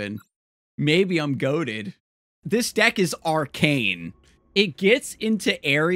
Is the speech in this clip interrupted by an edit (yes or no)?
yes